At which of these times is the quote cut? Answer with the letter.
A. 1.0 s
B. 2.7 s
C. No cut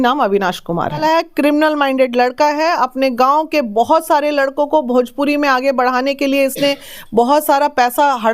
A